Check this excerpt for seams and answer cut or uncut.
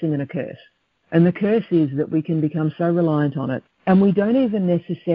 cut